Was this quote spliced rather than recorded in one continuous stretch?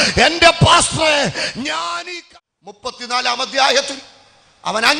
yes; 1 cut; at 1.9 s

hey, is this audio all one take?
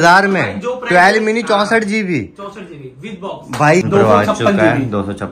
no; 1 cut; at 3.8 s

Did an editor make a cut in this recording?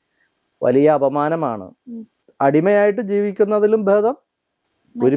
yes; 1 cut; at 2.2 s

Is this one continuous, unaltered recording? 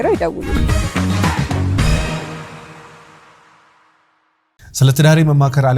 no; 1 cut; at 4.5 s

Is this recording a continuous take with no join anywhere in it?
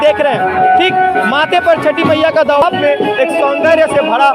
no; 1 cut; at 2.6 s

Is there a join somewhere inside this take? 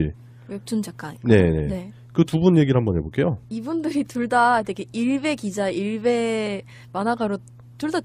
no; 0 cuts

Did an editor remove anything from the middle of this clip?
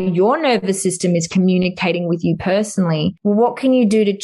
yes; 1 cut; at 3.2 s

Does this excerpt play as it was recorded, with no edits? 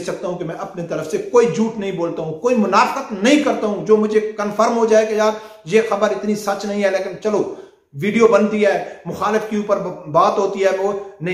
yes; 0 cuts

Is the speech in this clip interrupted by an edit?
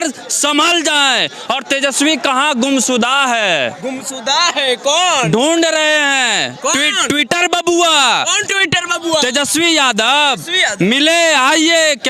no; 0 cuts

